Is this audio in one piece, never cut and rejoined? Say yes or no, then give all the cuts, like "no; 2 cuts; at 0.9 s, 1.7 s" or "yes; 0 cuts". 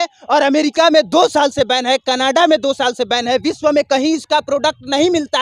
yes; 0 cuts